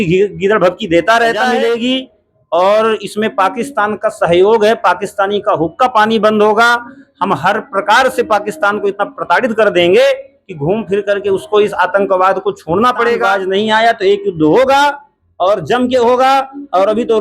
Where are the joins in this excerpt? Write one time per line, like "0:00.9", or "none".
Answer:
0:01.5
0:13.2